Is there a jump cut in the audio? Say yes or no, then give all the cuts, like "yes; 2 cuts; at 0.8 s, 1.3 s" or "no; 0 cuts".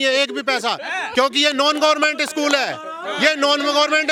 no; 0 cuts